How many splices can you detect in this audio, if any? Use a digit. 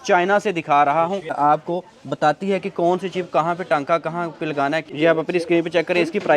2